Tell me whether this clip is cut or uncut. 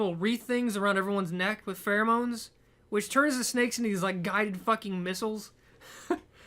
cut